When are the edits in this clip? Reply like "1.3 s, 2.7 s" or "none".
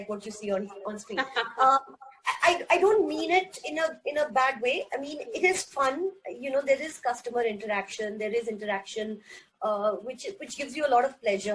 none